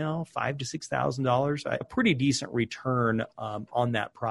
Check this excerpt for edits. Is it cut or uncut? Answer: cut